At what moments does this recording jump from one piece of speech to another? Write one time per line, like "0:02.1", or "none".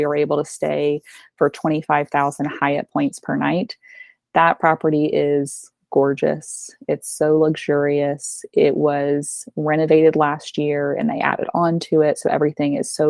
none